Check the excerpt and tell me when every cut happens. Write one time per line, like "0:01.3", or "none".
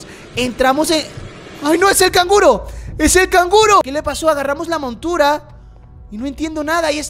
0:03.8